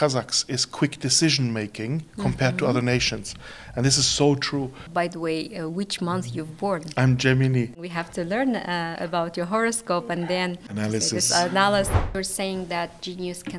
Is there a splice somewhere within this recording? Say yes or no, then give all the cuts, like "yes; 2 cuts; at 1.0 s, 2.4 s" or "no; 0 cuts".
yes; 4 cuts; at 4.8 s, 7.8 s, 10.7 s, 12.1 s